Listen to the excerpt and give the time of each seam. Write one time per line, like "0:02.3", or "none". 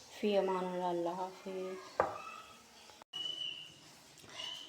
0:03.1